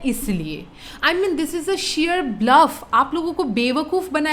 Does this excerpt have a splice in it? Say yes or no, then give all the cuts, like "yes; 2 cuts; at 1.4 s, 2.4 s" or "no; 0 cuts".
no; 0 cuts